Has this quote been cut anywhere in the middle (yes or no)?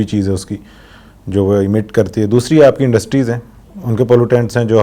no